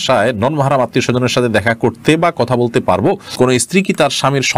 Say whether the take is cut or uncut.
cut